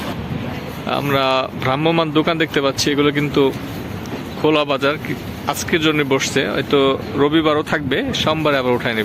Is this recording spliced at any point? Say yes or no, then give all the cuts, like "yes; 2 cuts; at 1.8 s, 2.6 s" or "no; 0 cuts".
no; 0 cuts